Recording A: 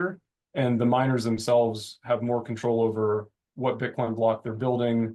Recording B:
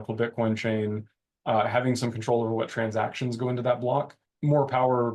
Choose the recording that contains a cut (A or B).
B